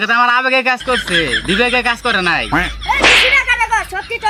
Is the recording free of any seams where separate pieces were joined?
yes; 0 cuts

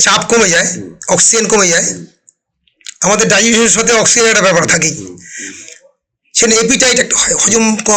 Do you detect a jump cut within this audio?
no; 0 cuts

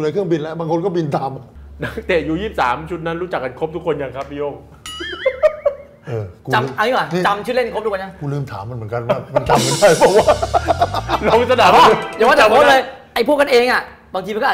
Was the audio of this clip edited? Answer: yes; 1 cut; at 1.5 s

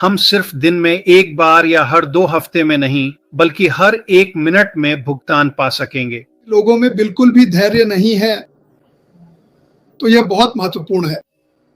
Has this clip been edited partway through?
yes; 1 cut; at 6.5 s

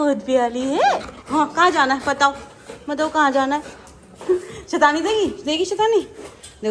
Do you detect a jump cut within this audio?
no; 0 cuts

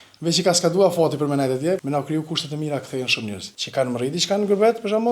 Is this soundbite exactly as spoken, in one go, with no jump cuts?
no; 2 cuts; at 1.8 s, 3.5 s

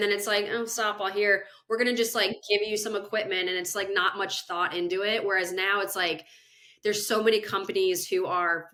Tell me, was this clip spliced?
no; 0 cuts

